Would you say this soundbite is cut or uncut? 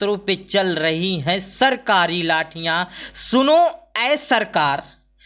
uncut